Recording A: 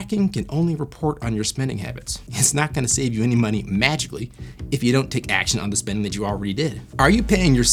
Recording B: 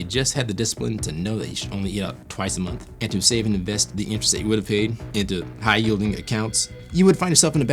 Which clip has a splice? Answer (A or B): B